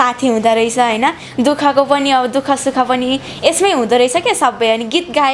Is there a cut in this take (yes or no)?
no